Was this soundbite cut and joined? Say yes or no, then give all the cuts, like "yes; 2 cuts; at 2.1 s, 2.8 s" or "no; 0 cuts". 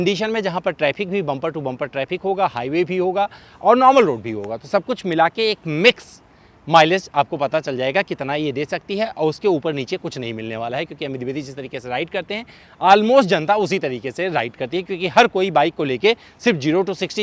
no; 0 cuts